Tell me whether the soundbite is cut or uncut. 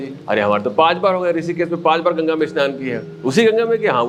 uncut